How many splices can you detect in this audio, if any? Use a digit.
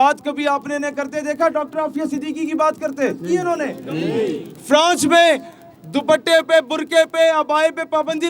1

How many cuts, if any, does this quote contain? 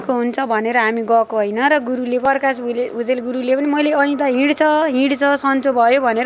1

